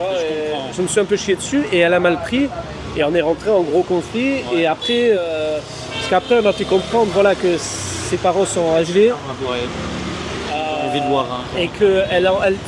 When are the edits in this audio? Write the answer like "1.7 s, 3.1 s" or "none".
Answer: none